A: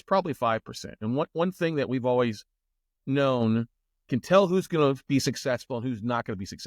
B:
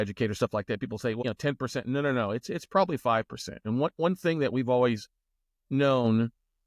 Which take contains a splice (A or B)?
B